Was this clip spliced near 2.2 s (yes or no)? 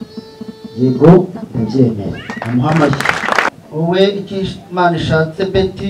no